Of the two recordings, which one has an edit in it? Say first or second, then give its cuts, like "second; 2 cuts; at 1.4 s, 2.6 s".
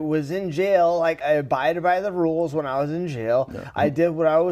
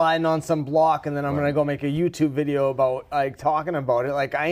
first; 1 cut; at 1.2 s